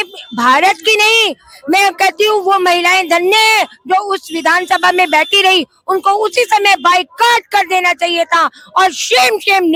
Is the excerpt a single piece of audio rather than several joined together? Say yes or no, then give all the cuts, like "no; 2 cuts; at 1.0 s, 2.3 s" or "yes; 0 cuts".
yes; 0 cuts